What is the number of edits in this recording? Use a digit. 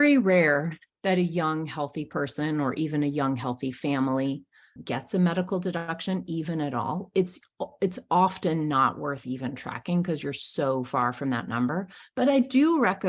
1